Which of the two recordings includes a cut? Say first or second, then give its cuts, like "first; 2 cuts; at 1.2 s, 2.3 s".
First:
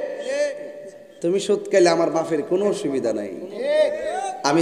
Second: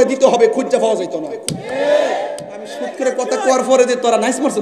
second; 1 cut; at 2.9 s